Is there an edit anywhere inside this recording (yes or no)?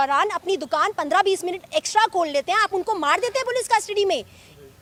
no